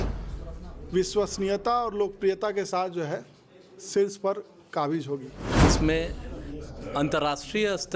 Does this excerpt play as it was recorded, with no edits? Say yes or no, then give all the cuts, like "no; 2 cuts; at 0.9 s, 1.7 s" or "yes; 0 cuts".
no; 1 cut; at 5.4 s